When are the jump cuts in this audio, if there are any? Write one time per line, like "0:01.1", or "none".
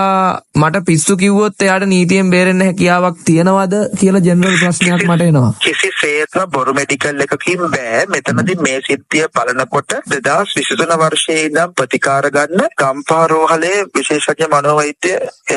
none